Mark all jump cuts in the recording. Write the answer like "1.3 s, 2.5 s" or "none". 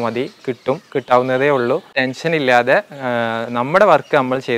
2.0 s